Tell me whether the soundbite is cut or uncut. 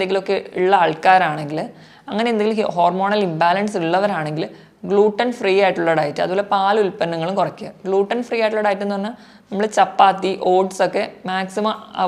uncut